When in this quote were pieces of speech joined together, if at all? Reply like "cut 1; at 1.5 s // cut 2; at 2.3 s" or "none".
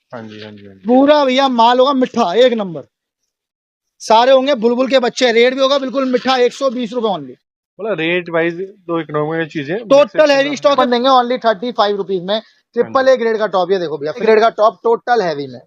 cut 1; at 10.8 s // cut 2; at 14.2 s